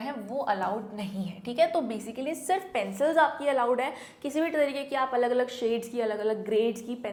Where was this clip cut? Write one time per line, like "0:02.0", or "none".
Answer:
none